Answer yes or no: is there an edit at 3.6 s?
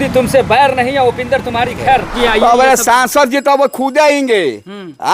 no